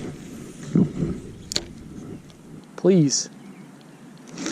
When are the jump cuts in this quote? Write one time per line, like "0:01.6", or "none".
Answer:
0:02.6